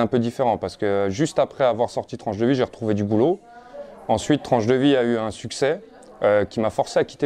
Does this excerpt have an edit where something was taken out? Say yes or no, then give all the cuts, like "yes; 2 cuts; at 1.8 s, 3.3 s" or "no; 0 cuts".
no; 0 cuts